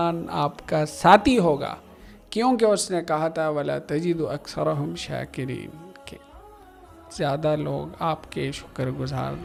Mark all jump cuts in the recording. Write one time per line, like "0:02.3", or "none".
none